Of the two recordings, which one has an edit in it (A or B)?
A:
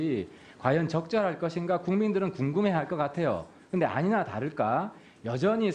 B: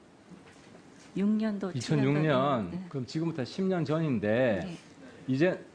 A